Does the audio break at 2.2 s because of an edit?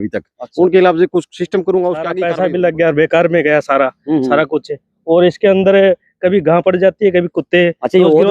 yes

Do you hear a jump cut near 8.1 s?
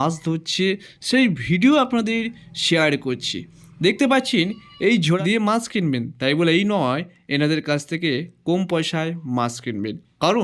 no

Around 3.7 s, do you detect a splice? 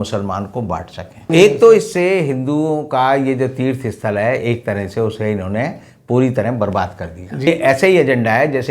no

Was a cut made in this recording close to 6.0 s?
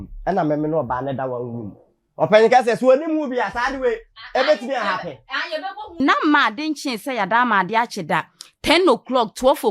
yes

